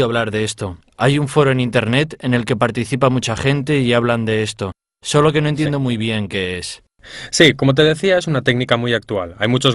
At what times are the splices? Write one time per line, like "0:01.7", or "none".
0:04.1